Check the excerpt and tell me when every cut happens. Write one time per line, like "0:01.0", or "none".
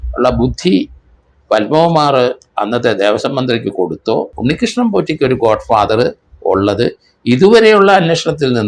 0:04.3